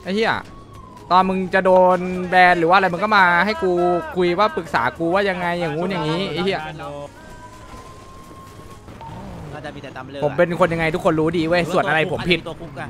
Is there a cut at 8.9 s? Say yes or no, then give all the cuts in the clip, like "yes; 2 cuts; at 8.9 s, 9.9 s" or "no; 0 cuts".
yes; 1 cut; at 8.9 s